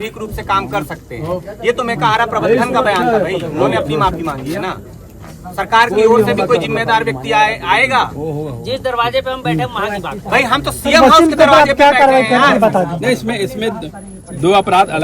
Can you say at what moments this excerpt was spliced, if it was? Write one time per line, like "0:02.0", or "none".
none